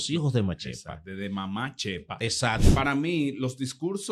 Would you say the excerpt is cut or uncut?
cut